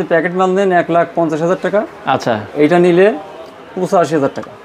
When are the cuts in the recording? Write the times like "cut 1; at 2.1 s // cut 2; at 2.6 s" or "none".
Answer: none